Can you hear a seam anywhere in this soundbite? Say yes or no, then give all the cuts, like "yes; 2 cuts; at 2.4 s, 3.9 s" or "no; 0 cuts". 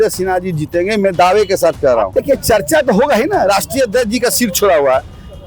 yes; 1 cut; at 2.1 s